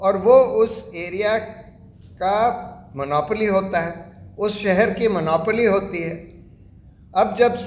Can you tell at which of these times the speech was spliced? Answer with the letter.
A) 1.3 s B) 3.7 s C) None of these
C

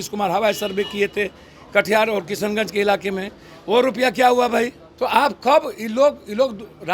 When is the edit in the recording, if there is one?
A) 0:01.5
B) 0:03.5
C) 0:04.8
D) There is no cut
C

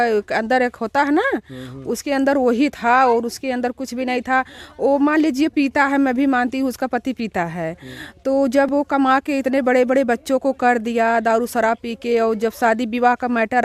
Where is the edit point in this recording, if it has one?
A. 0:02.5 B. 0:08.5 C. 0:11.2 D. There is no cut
D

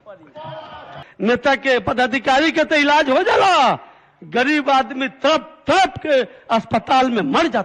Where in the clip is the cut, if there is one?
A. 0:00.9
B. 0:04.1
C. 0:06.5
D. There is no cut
A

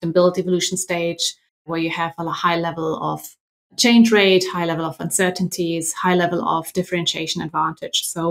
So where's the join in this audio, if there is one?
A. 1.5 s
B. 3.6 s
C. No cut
A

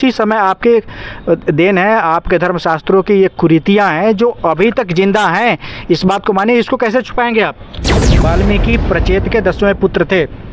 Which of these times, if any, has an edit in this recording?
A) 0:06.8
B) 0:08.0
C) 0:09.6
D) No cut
B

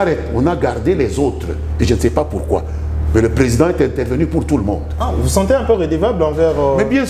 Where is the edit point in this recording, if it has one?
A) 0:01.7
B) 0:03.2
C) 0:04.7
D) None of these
D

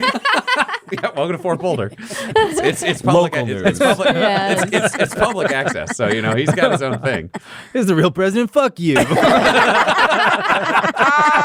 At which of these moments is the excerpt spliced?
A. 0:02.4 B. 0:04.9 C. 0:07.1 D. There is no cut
D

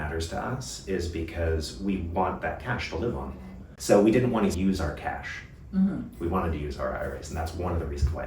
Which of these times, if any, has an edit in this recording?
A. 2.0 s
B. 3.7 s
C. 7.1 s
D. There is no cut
B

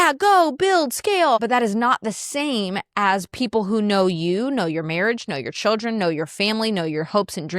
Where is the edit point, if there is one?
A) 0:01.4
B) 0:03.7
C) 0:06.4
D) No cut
A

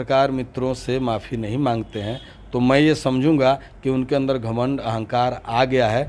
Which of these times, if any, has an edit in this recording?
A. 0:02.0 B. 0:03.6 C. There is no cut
C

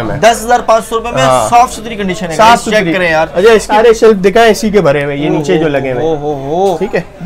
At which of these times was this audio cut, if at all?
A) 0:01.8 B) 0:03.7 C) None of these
B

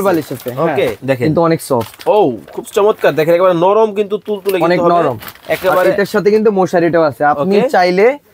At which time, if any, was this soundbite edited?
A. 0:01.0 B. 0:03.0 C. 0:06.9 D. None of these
A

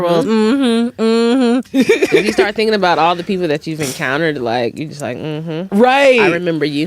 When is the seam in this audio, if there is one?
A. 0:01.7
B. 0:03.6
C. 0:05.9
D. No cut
A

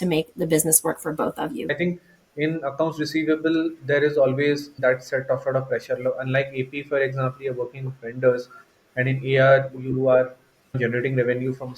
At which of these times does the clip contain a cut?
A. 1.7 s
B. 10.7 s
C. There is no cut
A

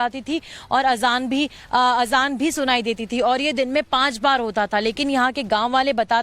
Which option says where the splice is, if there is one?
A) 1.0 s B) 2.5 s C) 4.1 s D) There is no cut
A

